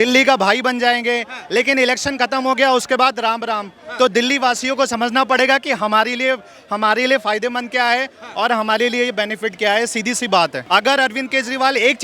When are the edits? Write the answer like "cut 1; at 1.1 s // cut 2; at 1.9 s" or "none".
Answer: cut 1; at 10.6 s